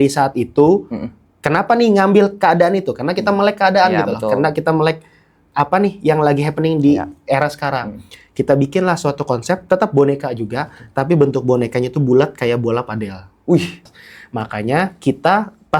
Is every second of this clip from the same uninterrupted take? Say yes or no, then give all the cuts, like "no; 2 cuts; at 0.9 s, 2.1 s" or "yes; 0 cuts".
no; 1 cut; at 13.9 s